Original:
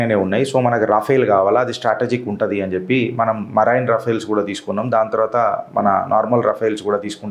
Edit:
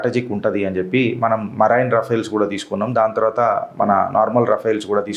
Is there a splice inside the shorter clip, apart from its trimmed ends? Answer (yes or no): no